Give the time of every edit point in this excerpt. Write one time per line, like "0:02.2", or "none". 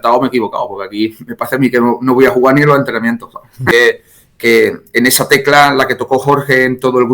0:03.7